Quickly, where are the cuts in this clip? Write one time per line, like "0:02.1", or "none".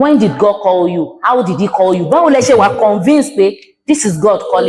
none

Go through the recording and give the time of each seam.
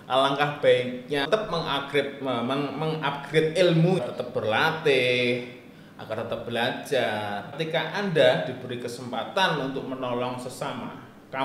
0:01.3
0:04.0
0:07.5

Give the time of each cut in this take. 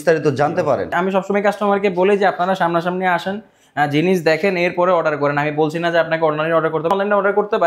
0:00.9
0:06.9

